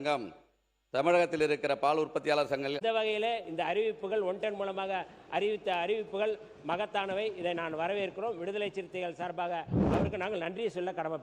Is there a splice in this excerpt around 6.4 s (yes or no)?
no